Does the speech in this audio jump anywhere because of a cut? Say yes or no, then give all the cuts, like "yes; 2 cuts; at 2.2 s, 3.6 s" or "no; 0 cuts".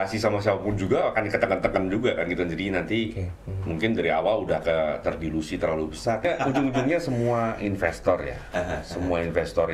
yes; 1 cut; at 6.2 s